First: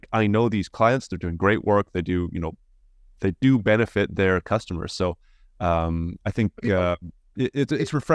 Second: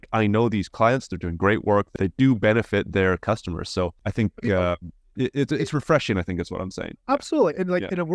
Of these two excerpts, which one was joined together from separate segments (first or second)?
second